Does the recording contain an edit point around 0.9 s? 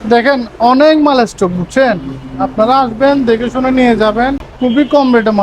no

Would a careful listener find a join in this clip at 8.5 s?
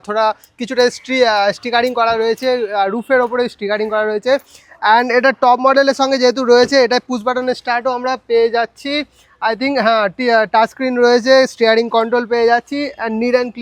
no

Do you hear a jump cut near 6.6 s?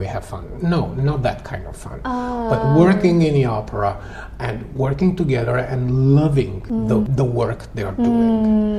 yes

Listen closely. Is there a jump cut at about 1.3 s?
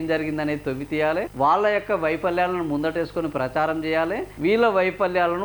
yes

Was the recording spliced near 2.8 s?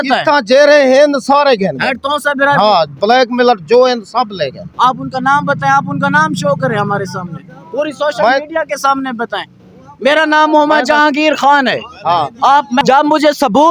no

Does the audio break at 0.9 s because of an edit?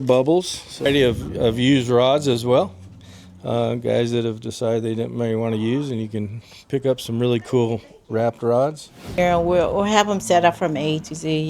yes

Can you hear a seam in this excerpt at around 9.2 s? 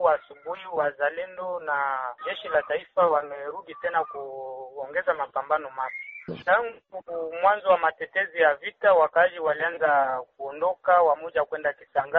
no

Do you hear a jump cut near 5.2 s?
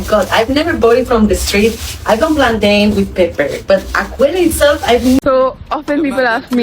yes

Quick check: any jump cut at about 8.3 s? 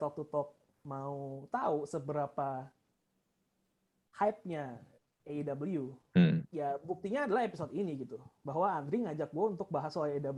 no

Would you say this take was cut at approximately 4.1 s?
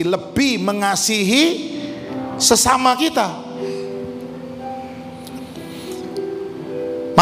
no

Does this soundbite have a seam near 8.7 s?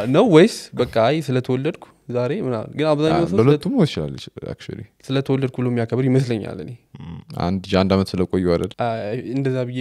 yes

